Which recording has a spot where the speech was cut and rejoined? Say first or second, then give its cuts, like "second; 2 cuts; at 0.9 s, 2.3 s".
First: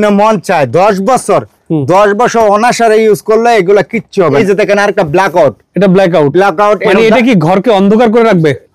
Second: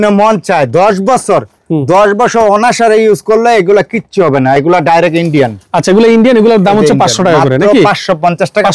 first; 1 cut; at 4.4 s